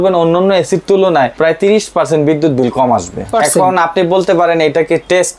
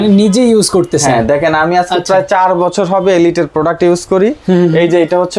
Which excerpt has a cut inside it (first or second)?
first